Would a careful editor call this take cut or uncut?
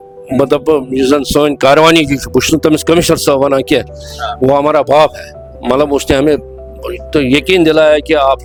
uncut